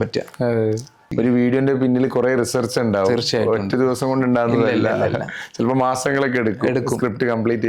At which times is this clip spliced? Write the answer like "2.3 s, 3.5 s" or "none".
1.1 s